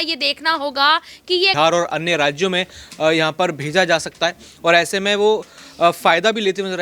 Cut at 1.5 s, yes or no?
yes